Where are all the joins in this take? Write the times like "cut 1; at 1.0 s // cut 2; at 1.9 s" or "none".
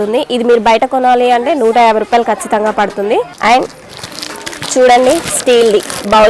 cut 1; at 3.3 s